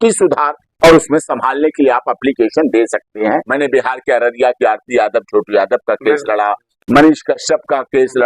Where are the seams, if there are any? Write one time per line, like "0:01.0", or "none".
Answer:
0:03.5